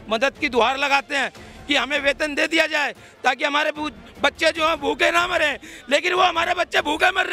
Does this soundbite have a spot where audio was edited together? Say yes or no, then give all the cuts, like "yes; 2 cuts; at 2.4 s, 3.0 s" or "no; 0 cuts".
no; 0 cuts